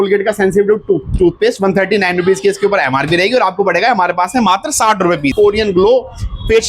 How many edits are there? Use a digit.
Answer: 1